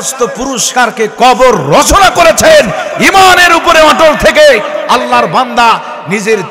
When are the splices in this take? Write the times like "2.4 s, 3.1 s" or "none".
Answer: none